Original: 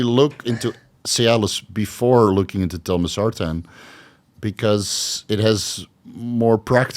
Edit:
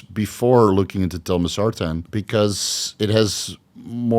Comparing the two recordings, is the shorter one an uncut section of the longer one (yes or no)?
no